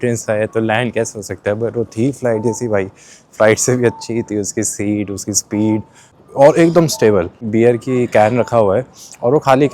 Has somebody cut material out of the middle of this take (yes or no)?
yes